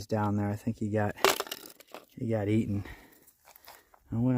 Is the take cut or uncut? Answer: uncut